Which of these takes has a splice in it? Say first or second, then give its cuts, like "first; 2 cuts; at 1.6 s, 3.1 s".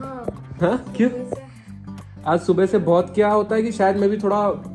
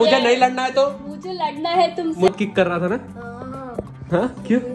second; 1 cut; at 2.3 s